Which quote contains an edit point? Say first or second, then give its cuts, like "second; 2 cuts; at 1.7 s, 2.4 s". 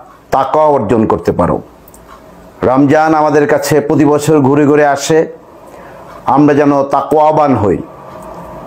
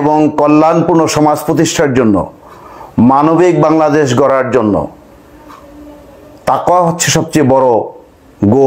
first; 1 cut; at 1.0 s